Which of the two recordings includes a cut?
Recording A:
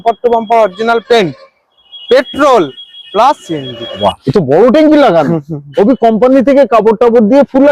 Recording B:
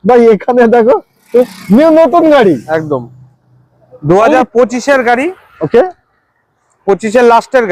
A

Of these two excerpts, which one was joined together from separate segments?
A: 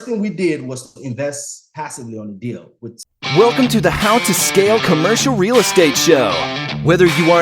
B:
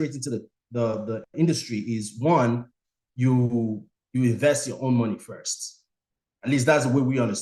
A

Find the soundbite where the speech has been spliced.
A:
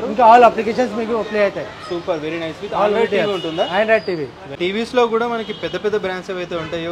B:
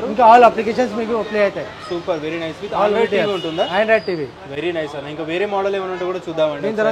A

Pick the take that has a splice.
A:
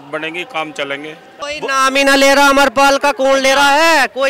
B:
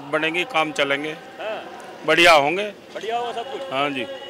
A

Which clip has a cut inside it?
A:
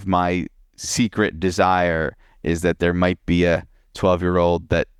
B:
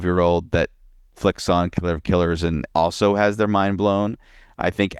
B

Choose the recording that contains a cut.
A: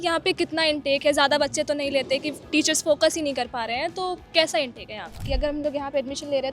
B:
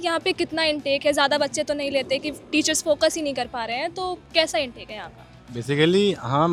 A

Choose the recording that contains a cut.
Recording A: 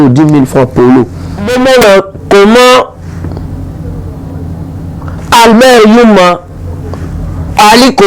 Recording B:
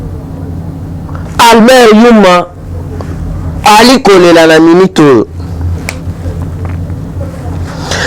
A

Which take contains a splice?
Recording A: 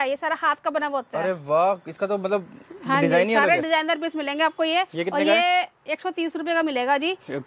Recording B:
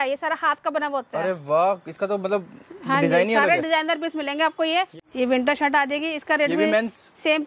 B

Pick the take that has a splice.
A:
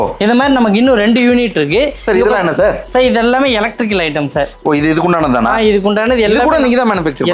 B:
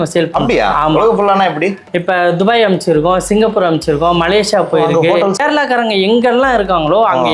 B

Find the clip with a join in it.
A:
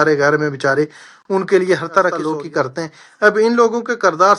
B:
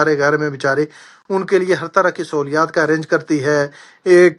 A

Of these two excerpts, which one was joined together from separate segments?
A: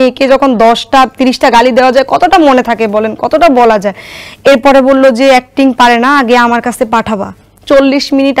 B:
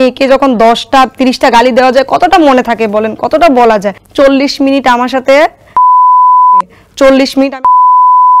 B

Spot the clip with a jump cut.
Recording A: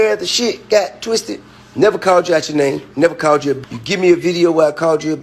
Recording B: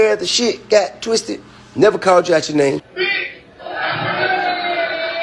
A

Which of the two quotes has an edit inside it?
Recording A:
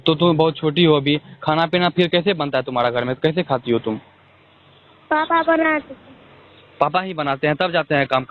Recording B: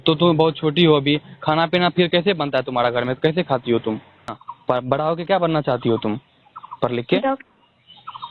B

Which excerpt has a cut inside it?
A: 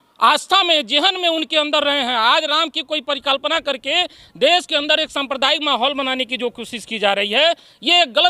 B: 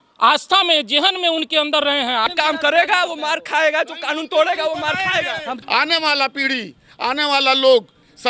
B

